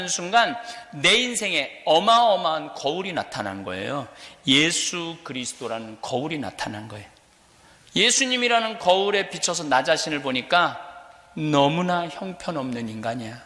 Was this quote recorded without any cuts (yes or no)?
yes